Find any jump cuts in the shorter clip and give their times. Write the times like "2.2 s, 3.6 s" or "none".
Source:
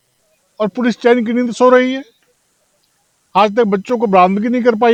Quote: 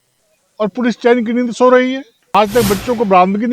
2.1 s